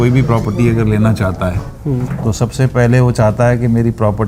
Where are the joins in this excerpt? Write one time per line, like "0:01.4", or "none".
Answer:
none